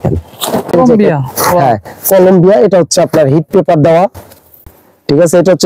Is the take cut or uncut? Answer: cut